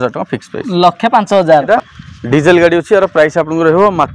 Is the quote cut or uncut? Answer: cut